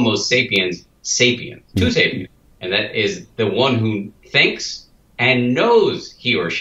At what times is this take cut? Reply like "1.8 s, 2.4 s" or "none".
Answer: 1.6 s, 4.2 s